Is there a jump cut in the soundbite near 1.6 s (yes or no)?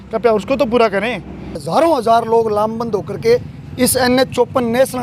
yes